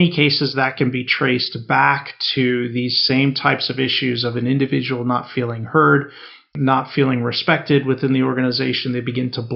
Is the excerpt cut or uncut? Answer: cut